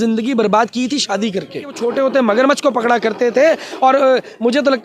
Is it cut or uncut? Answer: cut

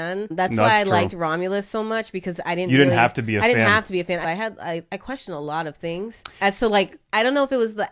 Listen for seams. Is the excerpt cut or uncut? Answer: cut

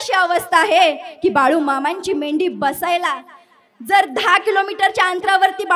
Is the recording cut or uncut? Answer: uncut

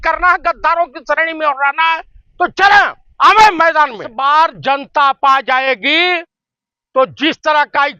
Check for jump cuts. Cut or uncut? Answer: cut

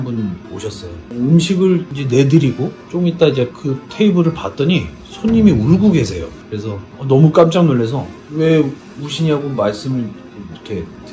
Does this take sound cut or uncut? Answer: uncut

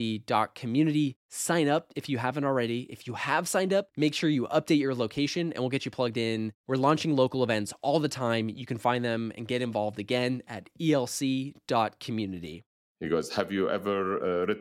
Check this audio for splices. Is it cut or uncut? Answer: cut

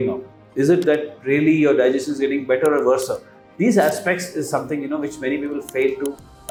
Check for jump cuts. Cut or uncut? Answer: uncut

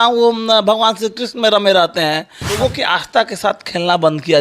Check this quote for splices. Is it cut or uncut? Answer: cut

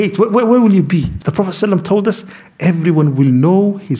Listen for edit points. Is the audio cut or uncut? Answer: cut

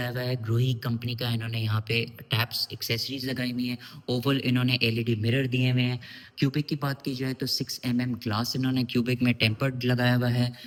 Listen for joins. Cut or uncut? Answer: uncut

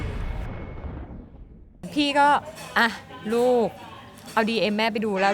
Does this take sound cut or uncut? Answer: cut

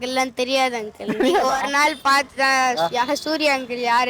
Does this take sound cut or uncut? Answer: uncut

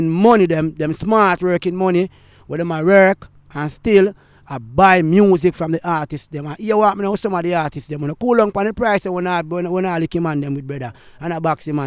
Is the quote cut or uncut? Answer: uncut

